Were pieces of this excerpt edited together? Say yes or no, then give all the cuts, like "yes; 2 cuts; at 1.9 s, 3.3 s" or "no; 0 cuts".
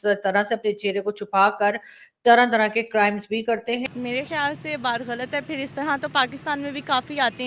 yes; 1 cut; at 3.8 s